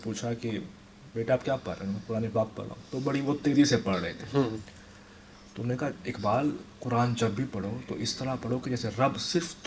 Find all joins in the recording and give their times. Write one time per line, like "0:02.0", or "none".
none